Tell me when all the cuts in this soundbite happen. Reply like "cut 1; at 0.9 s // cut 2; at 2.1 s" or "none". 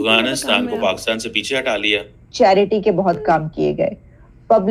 cut 1; at 2.2 s